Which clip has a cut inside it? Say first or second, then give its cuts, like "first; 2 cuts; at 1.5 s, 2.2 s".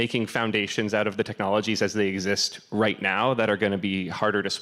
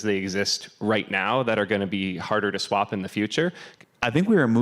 second; 1 cut; at 3.6 s